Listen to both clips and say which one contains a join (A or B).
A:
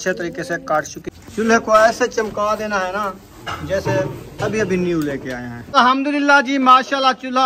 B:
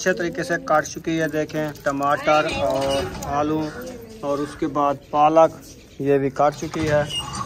A